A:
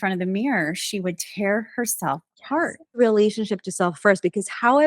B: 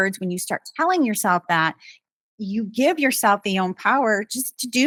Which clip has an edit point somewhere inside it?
A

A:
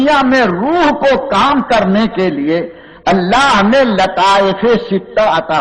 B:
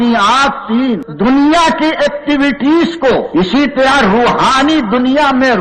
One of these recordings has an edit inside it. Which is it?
B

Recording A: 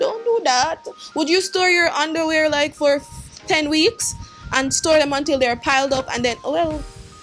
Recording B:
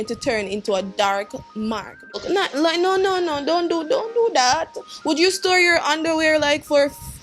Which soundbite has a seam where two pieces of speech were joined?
B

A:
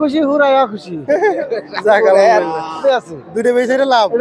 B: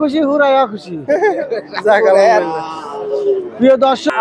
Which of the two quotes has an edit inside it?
A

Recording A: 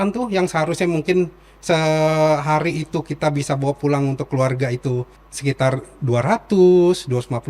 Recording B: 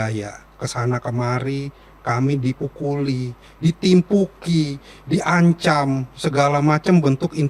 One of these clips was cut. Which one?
A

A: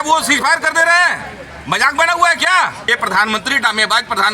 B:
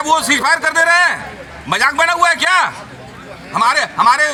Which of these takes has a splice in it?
A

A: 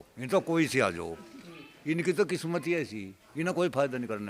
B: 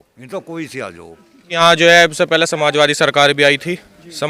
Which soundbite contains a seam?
B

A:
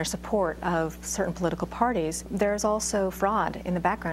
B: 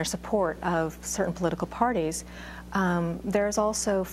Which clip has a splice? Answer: A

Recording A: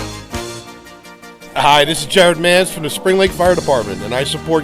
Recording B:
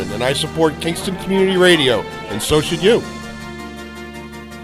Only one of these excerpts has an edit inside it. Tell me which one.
A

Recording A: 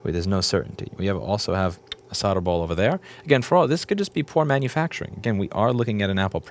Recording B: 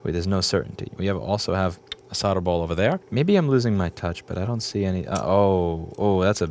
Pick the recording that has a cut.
B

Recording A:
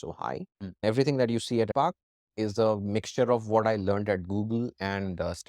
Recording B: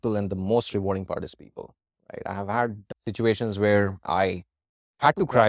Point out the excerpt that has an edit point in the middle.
A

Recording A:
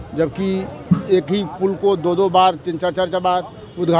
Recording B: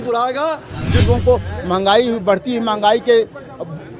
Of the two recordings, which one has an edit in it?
B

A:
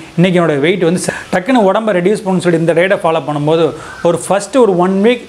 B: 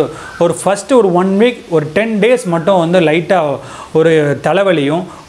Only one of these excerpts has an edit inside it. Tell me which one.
A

